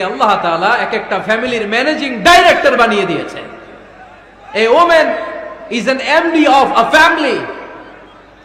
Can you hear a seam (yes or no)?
no